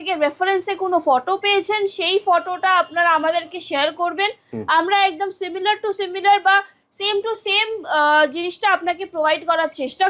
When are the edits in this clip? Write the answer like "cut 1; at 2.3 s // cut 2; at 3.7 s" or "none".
none